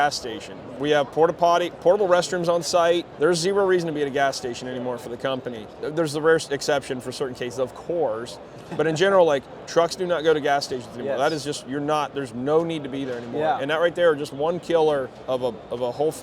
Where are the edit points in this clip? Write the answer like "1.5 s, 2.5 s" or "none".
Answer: 3.1 s, 5.7 s, 15.1 s